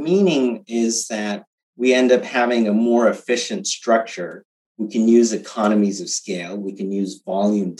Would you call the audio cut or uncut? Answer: uncut